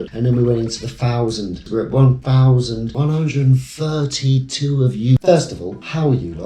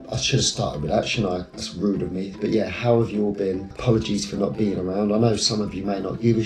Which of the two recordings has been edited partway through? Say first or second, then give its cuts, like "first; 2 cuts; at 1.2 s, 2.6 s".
first; 3 cuts; at 1.7 s, 2.9 s, 5.2 s